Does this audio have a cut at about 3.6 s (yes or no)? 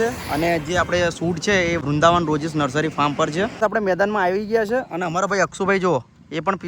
yes